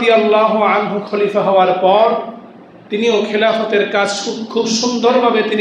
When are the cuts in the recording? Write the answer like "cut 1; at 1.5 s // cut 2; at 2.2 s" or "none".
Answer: none